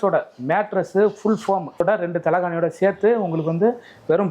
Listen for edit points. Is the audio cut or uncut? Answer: cut